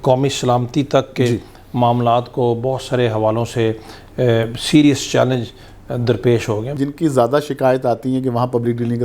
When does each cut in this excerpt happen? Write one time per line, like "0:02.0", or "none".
0:06.8